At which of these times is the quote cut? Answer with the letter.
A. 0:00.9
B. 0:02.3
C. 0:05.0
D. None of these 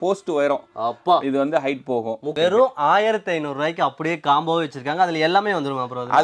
B